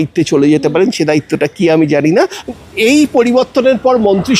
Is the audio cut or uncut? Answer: cut